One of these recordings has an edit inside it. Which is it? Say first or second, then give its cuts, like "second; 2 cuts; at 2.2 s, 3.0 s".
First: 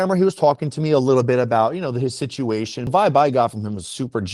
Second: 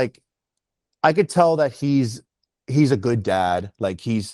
first; 1 cut; at 2.9 s